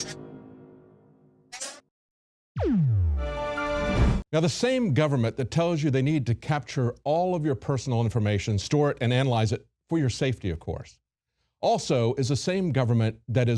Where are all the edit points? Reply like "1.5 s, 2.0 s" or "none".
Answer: none